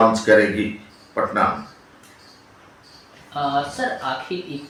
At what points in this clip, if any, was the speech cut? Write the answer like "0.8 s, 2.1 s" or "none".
none

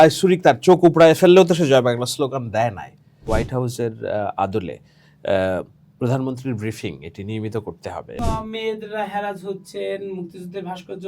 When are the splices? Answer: 3.2 s, 8.2 s

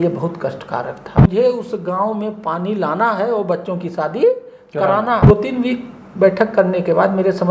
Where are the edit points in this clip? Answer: 1.1 s, 5.3 s

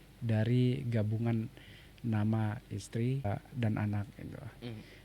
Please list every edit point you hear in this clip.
3.2 s

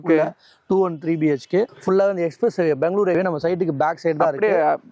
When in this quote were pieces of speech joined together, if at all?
1.9 s, 3.1 s

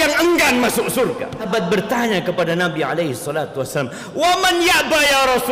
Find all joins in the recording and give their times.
1.5 s

